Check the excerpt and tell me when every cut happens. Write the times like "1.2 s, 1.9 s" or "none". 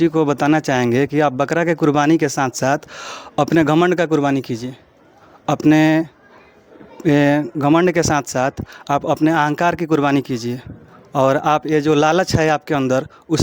none